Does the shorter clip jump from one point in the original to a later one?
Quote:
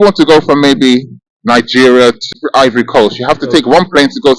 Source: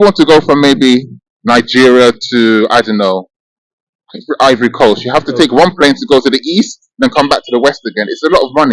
yes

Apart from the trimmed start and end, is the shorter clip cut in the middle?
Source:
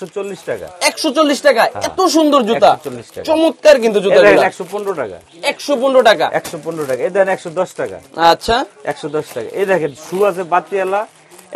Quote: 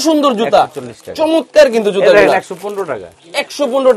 no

